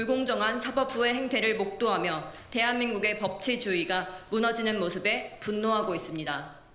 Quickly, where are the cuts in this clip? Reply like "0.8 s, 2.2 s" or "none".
none